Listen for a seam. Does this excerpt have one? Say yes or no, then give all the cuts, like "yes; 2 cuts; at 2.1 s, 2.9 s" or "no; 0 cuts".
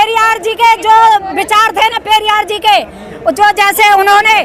no; 0 cuts